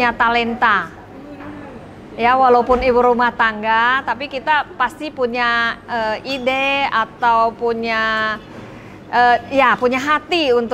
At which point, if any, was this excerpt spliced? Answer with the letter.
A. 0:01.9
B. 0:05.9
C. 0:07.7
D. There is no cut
D